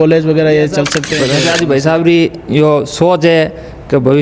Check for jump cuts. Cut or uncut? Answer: cut